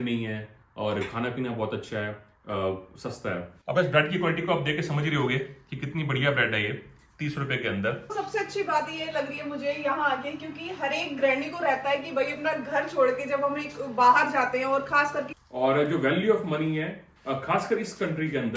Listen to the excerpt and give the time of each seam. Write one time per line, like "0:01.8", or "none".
0:08.0
0:15.4